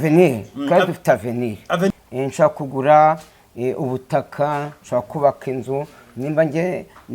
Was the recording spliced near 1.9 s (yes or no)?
yes